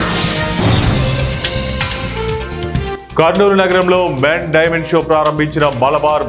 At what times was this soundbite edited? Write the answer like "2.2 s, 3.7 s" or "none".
3.0 s